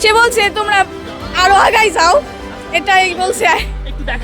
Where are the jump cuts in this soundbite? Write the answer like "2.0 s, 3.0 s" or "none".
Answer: none